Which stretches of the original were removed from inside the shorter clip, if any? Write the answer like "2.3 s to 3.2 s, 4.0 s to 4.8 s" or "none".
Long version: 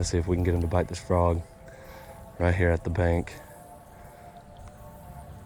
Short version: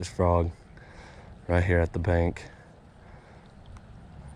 none